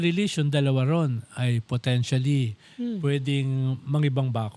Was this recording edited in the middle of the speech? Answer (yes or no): no